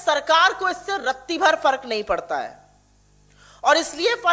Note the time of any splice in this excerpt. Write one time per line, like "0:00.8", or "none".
none